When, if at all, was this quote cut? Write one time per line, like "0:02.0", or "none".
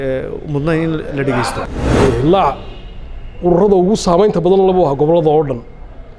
0:01.8